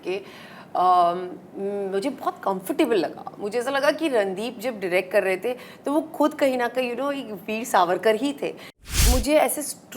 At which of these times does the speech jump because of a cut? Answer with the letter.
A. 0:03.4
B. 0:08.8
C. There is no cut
B